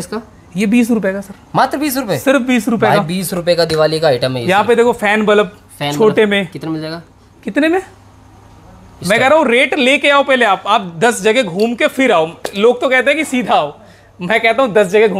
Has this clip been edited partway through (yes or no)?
no